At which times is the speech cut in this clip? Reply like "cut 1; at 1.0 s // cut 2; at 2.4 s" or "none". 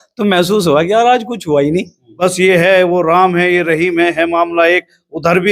cut 1; at 2.0 s